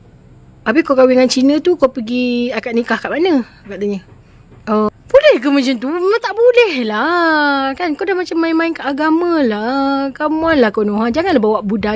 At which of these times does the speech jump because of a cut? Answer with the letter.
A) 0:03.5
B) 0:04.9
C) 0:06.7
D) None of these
B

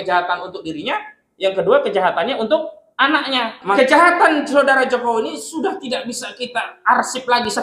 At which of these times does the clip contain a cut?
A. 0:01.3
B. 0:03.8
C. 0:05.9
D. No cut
B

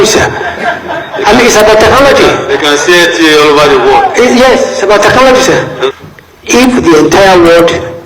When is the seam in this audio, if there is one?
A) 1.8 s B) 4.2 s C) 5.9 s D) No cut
C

